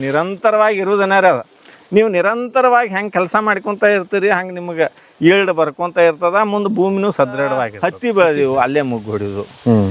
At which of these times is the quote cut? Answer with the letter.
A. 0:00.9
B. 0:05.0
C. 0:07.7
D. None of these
C